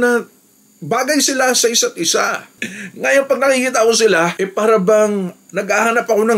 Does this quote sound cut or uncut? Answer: cut